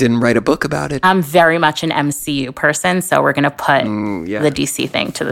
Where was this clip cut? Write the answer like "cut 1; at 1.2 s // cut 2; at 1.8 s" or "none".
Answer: cut 1; at 0.9 s